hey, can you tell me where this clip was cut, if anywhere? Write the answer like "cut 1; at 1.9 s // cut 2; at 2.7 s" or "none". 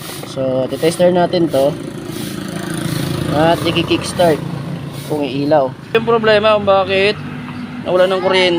cut 1; at 5.9 s